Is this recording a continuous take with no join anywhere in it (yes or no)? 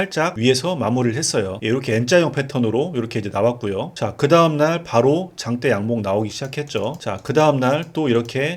no